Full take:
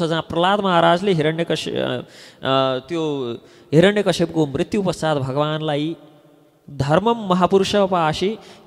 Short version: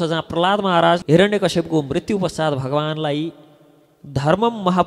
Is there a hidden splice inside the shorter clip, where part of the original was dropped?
yes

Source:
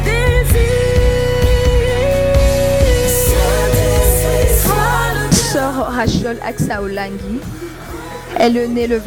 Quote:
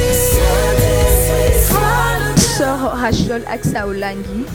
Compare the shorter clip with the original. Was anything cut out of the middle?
no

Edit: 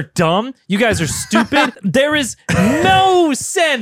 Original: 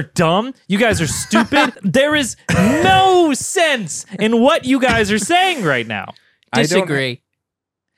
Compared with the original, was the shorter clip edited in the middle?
no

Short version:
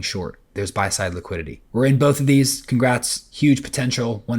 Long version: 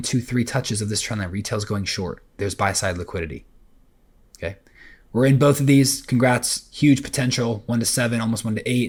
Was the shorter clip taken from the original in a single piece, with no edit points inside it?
no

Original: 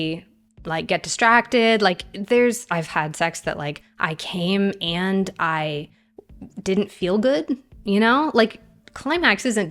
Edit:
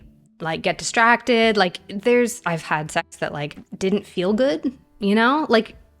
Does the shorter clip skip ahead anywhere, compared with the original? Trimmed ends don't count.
yes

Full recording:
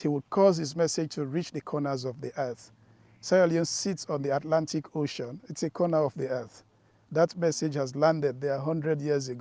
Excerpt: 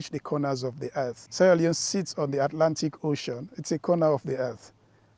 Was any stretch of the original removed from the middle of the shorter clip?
yes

